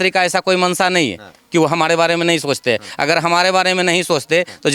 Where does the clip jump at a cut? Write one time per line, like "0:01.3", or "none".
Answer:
none